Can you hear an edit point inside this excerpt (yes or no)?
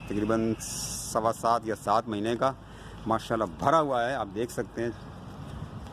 no